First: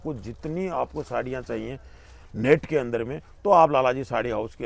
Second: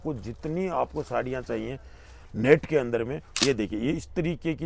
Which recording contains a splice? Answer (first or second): second